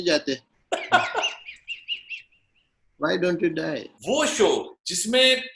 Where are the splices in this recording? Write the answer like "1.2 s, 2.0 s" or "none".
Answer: 3.9 s